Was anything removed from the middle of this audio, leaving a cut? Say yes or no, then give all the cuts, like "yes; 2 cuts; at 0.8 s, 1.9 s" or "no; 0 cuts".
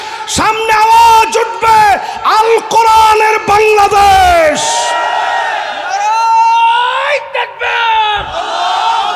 no; 0 cuts